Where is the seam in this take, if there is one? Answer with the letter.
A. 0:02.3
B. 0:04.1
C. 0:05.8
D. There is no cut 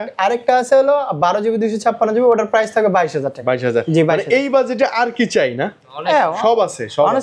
D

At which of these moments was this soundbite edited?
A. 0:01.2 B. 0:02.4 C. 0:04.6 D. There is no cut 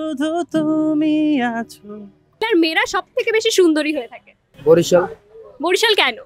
B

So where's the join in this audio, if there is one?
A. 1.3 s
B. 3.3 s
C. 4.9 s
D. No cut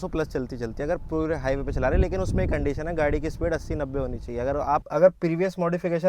C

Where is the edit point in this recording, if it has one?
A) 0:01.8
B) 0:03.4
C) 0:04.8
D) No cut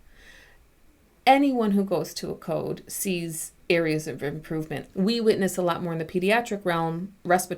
C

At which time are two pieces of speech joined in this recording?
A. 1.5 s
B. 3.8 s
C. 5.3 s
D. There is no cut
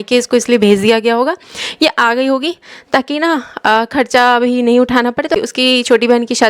C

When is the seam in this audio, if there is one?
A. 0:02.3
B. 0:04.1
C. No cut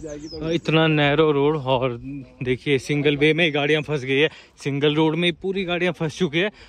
C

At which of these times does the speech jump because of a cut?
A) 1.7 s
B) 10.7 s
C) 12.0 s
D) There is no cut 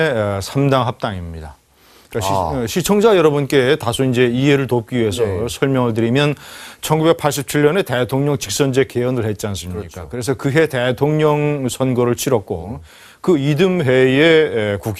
B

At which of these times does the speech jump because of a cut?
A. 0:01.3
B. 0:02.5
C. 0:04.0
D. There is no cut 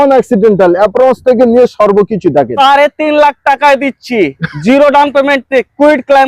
B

